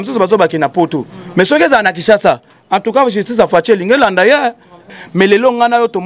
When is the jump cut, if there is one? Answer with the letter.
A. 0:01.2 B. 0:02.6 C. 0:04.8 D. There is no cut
C